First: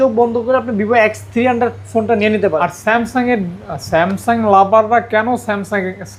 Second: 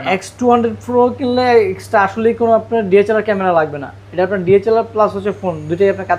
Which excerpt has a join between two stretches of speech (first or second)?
first